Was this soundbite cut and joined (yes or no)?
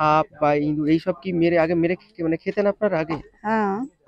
no